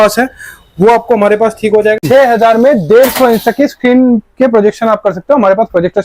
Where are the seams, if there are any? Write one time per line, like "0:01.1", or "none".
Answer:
0:02.0

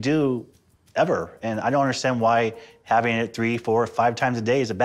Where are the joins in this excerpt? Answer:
none

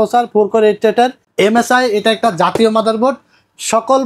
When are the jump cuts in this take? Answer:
0:01.2

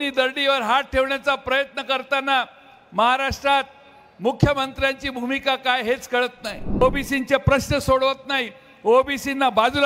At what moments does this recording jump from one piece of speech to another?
0:06.8

